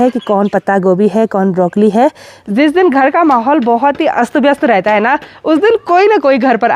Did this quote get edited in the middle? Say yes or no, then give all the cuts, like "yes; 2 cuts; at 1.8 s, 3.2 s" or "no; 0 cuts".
yes; 1 cut; at 2.3 s